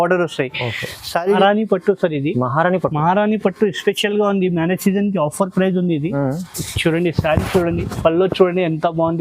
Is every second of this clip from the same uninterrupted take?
no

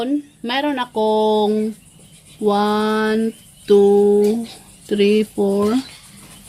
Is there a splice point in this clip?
no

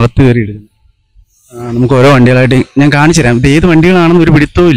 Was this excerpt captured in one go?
yes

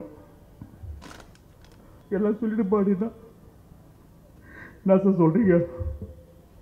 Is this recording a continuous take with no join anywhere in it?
no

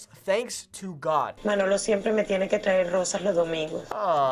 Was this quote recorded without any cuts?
no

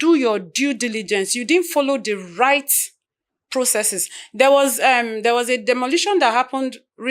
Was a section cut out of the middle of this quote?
no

